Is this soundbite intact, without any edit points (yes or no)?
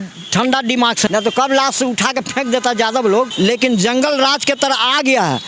no